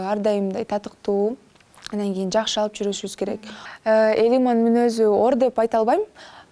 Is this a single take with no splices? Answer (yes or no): no